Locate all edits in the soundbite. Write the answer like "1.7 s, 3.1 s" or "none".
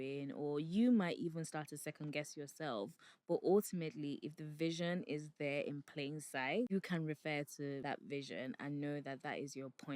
6.7 s, 7.8 s